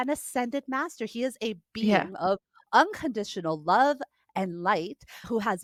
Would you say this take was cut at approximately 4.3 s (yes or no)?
no